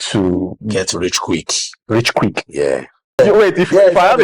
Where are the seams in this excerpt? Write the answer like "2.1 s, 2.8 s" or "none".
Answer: 3.2 s